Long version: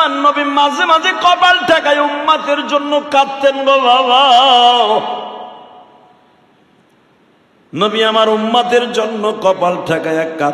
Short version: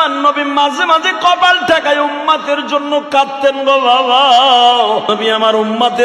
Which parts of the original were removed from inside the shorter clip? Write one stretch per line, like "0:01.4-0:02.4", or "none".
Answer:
0:05.1-0:07.8